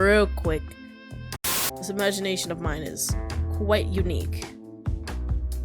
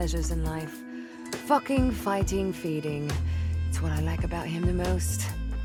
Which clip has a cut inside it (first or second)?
first